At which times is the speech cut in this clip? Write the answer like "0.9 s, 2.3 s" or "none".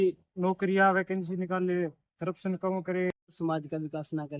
3.3 s